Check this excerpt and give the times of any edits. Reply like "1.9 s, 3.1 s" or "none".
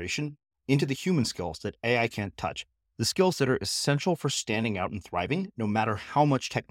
none